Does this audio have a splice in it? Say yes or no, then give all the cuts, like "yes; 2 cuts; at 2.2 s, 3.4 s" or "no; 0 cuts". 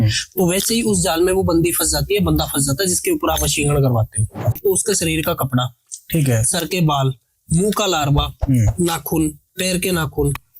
yes; 1 cut; at 4.6 s